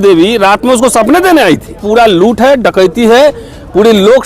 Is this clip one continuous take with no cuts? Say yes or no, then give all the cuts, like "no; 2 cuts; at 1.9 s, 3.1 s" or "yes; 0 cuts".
no; 1 cut; at 1.8 s